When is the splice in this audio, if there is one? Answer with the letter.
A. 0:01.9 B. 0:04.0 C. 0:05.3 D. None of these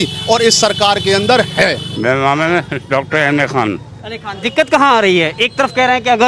D